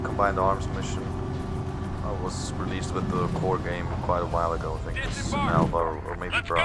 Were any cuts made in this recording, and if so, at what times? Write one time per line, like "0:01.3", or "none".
none